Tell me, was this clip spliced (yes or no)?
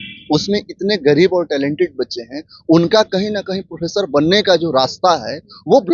no